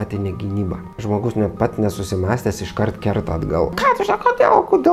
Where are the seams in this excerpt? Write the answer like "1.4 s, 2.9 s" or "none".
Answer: 3.7 s